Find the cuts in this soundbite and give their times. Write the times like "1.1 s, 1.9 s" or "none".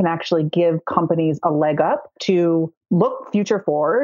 2.1 s, 2.8 s